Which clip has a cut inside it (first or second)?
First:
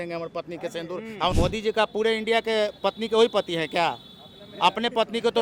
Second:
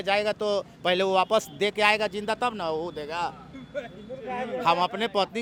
first